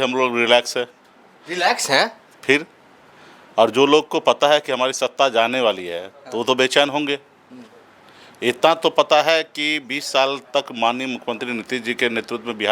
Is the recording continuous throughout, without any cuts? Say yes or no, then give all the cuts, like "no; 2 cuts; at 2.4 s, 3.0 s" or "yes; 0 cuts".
yes; 0 cuts